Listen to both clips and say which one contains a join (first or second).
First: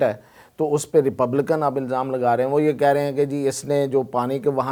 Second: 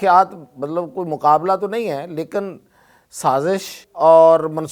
second